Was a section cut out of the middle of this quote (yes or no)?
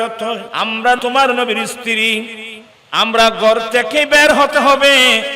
yes